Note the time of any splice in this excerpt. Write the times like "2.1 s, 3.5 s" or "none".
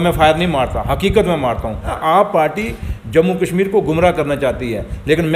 1.9 s